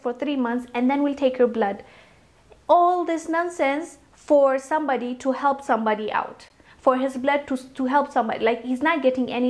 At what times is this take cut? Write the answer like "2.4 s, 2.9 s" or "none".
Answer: none